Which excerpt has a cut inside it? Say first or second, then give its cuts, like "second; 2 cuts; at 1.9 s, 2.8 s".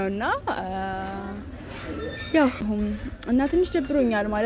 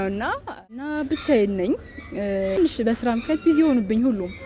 second; 2 cuts; at 0.9 s, 2.6 s